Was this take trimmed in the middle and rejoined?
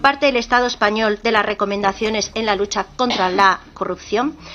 no; 0 cuts

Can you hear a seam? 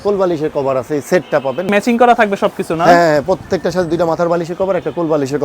yes; 1 cut; at 1.7 s

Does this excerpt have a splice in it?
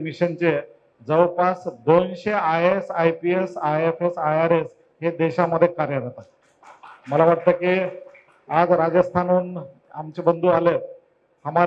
no; 0 cuts

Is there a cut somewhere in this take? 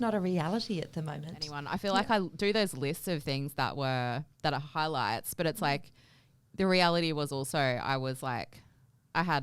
yes; 1 cut; at 1.6 s

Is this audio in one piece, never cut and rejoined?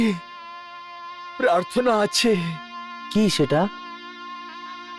yes; 0 cuts

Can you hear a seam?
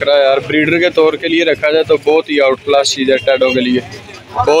no; 0 cuts

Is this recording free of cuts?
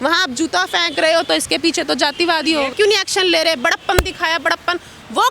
no; 1 cut; at 2.7 s

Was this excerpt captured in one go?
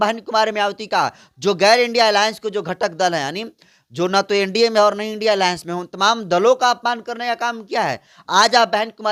yes; 0 cuts

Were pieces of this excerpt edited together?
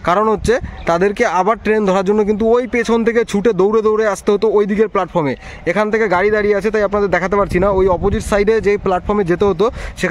no; 0 cuts

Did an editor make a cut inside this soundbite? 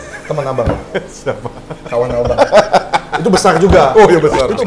no; 0 cuts

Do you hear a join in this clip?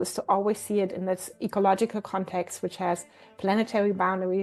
no; 0 cuts

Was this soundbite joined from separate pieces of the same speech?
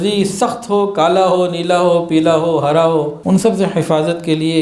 yes; 1 cut; at 3.2 s

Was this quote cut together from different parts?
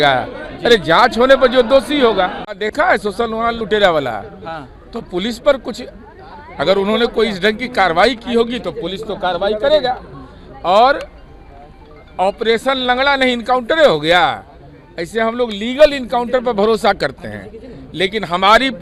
no; 0 cuts

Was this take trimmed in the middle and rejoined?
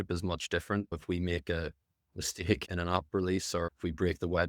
yes; 1 cut; at 0.9 s

